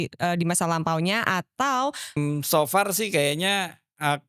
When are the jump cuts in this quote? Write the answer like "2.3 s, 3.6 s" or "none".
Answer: 2.1 s

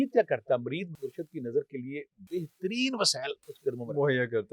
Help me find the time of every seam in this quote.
0.9 s, 3.4 s

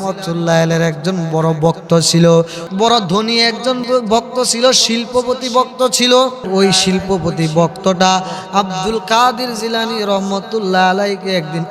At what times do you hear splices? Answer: 2.6 s, 3.8 s, 6.5 s

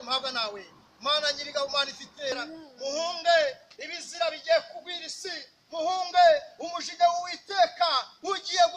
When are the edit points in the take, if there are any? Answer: 2.3 s

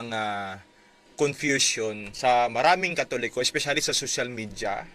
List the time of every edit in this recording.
none

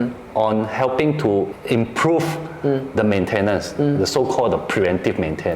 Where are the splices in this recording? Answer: 1.6 s

